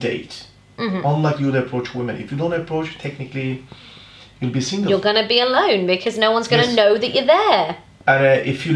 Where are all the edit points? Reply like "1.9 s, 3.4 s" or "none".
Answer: none